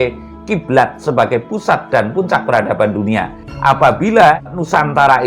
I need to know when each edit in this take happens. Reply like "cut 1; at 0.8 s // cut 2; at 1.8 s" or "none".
cut 1; at 3.5 s // cut 2; at 4.5 s